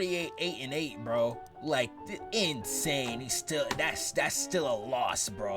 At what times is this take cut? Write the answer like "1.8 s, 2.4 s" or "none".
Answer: 1.5 s